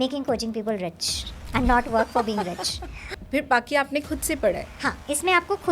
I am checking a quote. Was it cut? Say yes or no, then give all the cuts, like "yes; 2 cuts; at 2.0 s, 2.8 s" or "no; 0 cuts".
yes; 2 cuts; at 3.1 s, 4.7 s